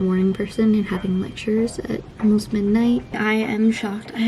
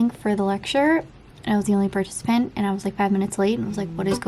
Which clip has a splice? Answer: first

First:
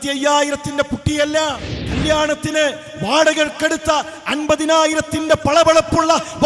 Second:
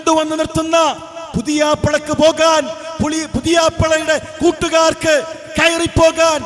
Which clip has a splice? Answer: first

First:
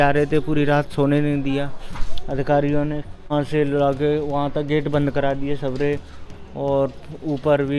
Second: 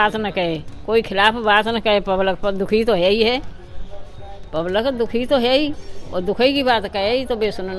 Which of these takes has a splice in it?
first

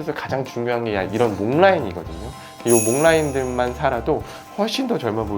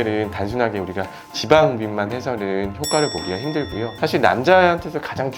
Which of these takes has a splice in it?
second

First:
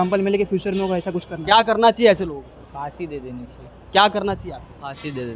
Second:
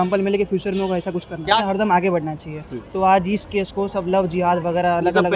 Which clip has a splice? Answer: second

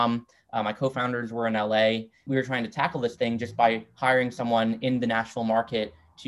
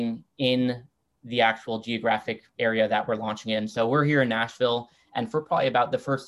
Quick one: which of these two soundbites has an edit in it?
first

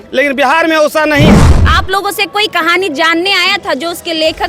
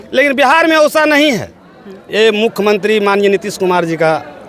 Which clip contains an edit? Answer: first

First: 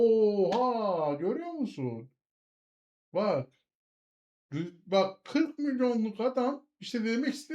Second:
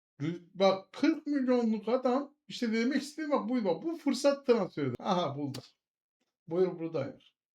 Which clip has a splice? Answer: second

